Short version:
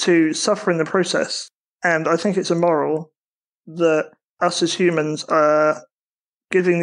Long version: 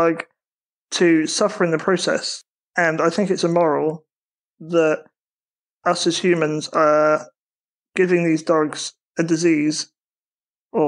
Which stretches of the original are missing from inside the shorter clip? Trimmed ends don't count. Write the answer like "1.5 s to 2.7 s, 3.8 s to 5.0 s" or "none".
5.1 s to 5.7 s